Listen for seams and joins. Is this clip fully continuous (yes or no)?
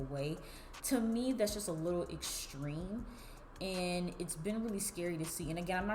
yes